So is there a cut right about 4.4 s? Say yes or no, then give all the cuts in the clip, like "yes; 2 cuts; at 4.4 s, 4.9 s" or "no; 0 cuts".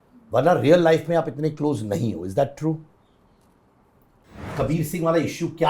yes; 1 cut; at 4.4 s